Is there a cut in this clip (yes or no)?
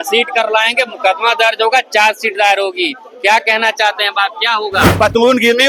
no